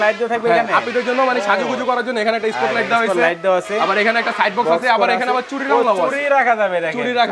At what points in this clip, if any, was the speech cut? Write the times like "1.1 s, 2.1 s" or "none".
none